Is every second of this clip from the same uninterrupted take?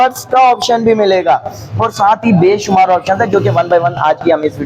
yes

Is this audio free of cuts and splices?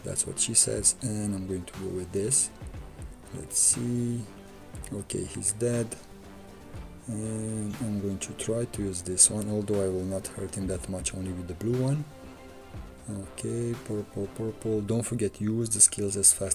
yes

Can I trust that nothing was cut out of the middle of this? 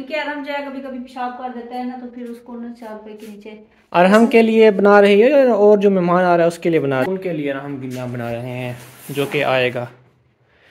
no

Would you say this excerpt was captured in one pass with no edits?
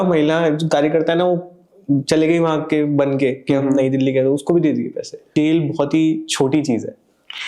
no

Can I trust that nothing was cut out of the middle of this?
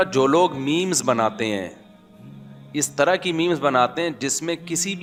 yes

